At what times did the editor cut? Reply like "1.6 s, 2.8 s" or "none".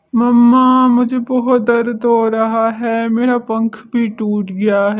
none